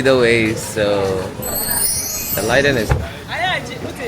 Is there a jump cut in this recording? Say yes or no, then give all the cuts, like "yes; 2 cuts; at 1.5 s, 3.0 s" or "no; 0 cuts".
yes; 1 cut; at 2.9 s